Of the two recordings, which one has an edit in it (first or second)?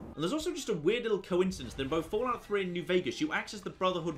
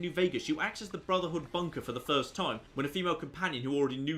second